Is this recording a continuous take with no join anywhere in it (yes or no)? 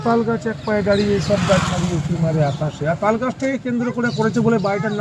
yes